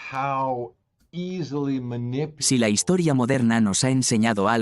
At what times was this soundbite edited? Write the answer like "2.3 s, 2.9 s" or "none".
2.4 s